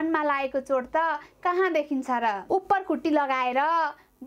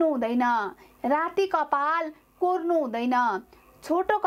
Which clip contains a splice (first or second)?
first